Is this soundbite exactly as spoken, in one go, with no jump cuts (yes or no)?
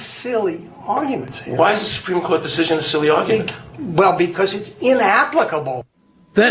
yes